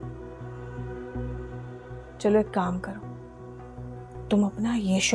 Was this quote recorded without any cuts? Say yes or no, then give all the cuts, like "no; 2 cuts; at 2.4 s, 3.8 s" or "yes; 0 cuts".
yes; 0 cuts